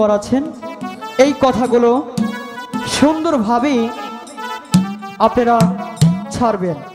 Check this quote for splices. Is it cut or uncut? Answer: uncut